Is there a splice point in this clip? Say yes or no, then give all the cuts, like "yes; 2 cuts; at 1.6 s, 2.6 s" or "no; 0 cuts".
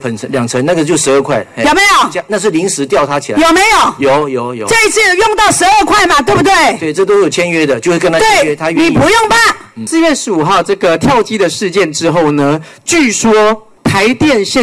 yes; 2 cuts; at 9.8 s, 13.7 s